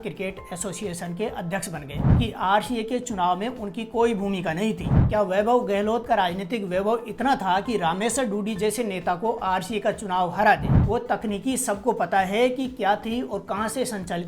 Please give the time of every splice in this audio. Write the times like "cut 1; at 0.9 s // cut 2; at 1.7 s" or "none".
cut 1; at 2.2 s // cut 2; at 4.9 s // cut 3; at 10.9 s